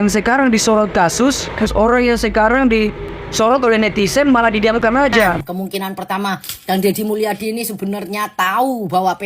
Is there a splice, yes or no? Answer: yes